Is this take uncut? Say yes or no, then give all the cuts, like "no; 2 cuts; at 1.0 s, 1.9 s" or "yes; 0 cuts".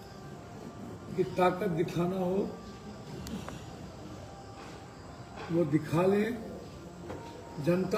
yes; 0 cuts